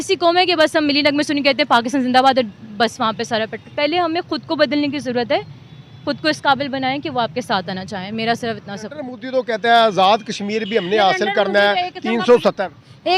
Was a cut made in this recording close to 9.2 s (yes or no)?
yes